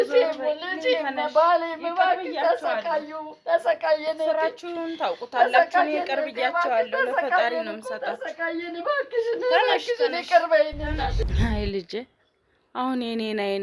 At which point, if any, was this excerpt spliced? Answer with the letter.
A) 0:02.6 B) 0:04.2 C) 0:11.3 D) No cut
C